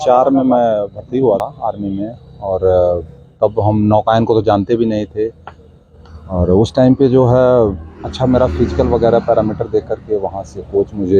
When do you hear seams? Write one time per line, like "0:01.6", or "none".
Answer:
0:01.4